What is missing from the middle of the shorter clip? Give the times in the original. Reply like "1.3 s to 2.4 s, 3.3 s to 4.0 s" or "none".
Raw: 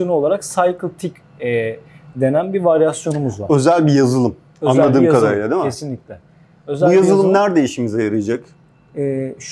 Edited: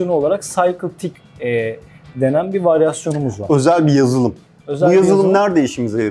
4.5 s to 6.5 s